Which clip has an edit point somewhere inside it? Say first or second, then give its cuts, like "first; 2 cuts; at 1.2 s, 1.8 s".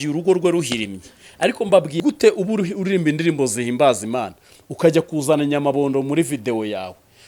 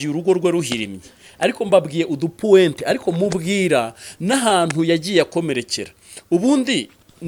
first; 1 cut; at 2.0 s